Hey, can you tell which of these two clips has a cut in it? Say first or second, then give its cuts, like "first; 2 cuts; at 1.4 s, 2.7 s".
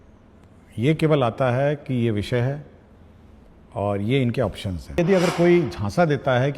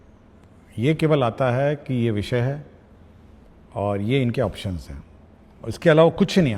first; 1 cut; at 5.0 s